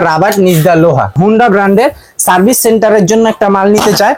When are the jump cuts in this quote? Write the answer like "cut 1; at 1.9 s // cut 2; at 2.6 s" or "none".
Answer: cut 1; at 1.1 s